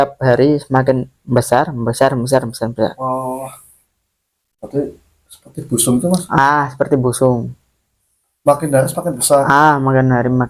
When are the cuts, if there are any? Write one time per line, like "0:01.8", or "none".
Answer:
none